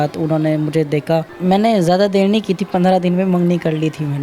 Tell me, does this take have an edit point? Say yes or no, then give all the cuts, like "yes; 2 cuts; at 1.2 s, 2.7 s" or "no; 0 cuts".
yes; 1 cut; at 1.3 s